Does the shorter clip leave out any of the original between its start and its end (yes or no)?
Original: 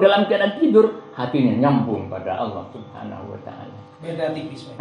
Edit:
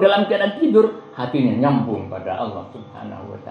no